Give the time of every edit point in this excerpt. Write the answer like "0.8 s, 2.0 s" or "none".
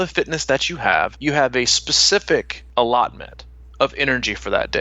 1.2 s, 2.6 s